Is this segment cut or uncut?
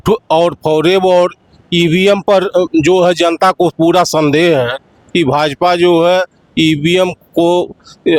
uncut